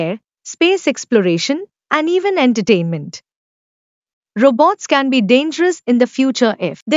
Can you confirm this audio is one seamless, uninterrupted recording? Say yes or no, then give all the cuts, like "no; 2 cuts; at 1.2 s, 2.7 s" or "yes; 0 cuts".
no; 1 cut; at 4.1 s